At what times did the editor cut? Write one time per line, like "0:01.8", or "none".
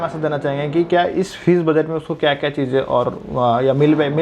none

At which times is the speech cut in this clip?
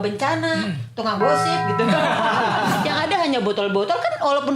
0:02.8

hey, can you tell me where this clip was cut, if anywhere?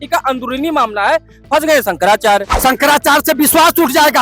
0:02.5

